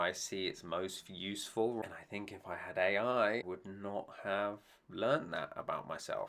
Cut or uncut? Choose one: cut